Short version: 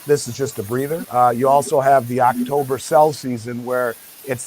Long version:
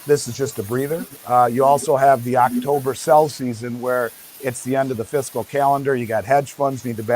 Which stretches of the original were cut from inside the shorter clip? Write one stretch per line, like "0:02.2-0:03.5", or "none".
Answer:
0:01.0-0:01.2